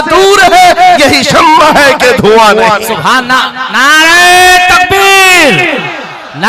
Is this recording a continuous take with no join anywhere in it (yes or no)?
yes